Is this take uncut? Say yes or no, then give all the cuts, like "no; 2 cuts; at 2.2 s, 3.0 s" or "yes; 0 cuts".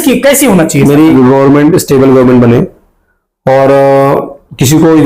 no; 1 cut; at 1.1 s